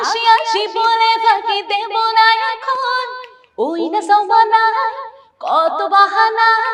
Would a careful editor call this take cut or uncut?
uncut